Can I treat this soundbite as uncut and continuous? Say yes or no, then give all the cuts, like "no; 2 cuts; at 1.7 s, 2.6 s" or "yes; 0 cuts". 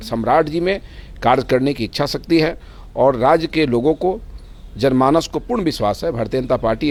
yes; 0 cuts